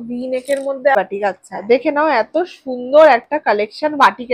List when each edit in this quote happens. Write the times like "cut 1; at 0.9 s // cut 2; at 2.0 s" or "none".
cut 1; at 0.9 s